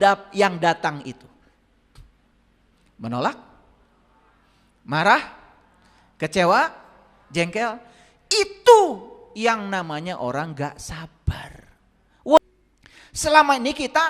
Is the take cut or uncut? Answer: cut